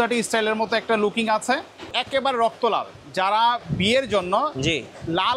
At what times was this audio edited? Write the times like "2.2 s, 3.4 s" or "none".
1.9 s